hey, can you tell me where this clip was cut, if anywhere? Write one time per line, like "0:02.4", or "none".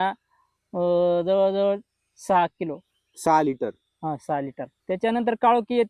0:04.7